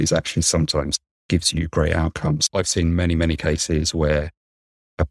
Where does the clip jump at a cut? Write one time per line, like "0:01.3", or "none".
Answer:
0:02.4

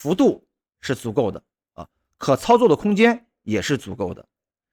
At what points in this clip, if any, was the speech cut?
none

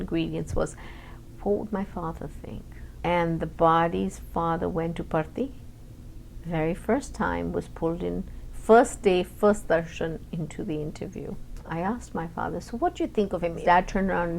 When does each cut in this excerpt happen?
0:02.9
0:11.6
0:13.6

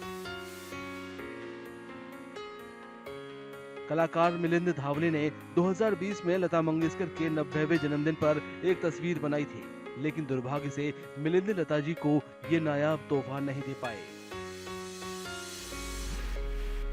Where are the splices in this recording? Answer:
0:01.0

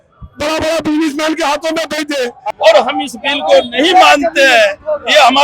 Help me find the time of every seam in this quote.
0:02.5

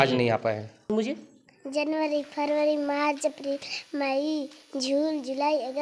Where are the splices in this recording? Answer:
0:00.9

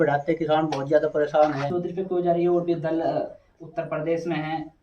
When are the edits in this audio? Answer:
0:01.7

